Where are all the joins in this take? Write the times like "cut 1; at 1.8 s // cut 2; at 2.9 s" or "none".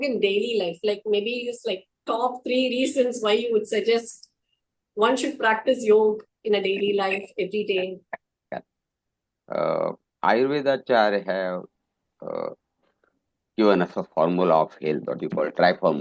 none